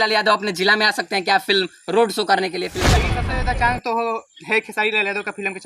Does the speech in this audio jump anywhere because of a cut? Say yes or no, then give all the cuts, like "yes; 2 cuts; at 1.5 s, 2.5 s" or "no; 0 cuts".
yes; 1 cut; at 3.1 s